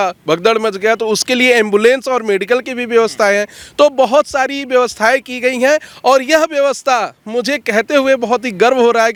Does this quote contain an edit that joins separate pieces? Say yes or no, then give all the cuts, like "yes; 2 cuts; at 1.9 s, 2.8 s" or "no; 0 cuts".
no; 0 cuts